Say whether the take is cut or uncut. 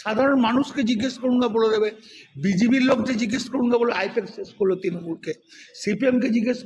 uncut